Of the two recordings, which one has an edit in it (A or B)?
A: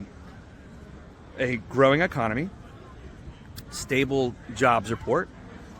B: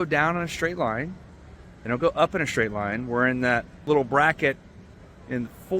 B